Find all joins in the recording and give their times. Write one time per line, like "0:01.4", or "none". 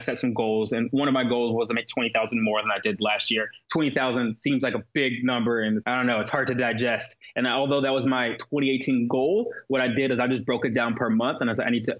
0:03.6
0:05.8